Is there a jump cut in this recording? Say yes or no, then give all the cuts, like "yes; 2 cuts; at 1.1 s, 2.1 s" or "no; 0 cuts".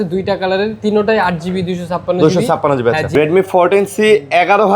yes; 1 cut; at 3.1 s